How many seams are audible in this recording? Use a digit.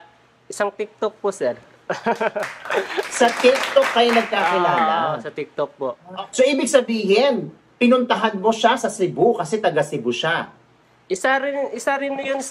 1